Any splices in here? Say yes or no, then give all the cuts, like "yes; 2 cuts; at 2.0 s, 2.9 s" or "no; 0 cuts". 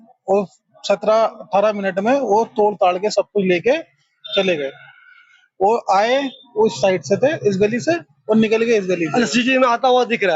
no; 0 cuts